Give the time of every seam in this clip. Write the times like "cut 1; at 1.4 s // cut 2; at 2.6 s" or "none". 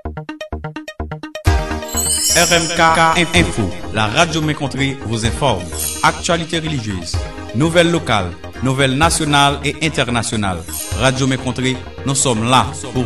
none